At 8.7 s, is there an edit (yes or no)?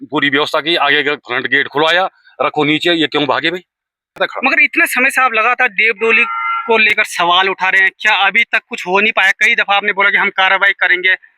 no